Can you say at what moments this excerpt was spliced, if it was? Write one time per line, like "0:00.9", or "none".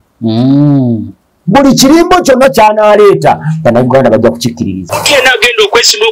0:04.8